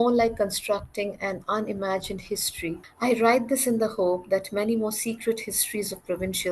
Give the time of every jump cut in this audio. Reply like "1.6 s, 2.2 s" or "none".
2.9 s